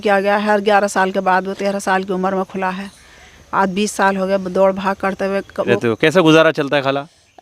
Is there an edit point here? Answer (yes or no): yes